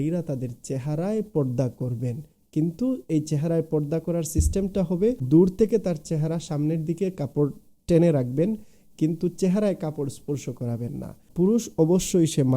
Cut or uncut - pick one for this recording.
cut